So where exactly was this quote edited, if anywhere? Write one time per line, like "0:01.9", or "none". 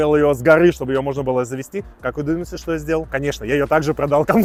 none